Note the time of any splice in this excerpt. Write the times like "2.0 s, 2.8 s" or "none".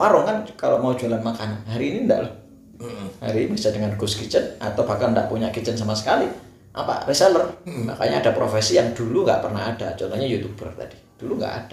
7.8 s